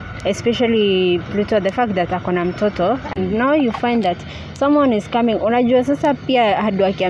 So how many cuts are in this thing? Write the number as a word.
one